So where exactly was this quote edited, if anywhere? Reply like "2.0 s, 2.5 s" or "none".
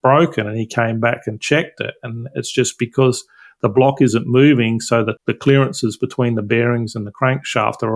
5.2 s